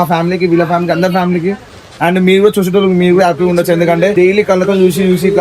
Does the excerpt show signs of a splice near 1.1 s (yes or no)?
no